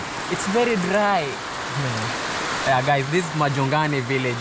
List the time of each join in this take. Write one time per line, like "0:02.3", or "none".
none